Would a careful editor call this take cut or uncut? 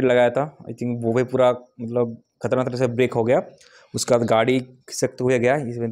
uncut